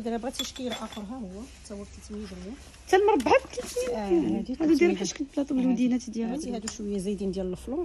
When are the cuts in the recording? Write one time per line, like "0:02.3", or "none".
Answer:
0:06.6